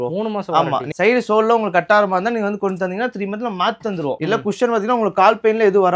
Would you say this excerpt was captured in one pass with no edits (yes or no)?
no